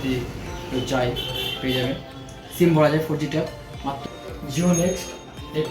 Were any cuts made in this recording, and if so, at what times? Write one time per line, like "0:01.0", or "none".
0:04.0